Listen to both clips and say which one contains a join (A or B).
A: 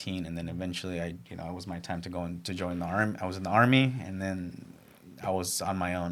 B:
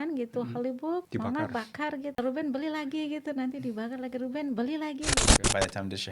B